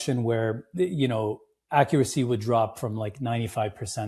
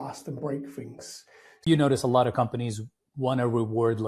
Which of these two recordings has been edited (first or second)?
second